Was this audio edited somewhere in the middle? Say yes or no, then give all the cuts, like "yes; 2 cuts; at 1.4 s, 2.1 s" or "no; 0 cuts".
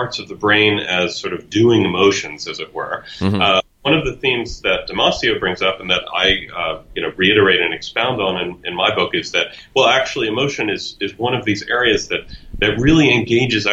no; 0 cuts